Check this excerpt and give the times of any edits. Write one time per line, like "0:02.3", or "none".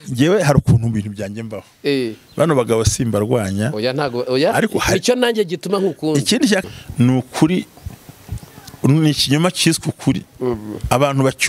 0:06.6